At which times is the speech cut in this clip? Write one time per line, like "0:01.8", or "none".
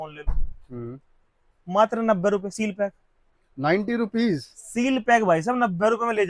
none